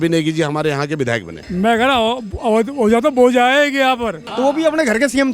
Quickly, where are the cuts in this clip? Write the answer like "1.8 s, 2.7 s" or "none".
1.4 s, 4.2 s